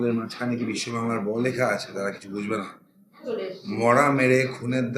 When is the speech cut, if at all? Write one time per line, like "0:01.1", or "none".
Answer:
0:03.0